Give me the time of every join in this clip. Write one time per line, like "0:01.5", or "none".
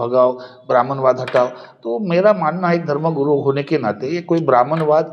none